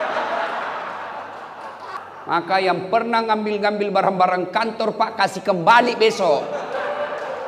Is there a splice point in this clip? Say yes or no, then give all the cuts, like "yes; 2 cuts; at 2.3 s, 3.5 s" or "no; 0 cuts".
yes; 1 cut; at 2.0 s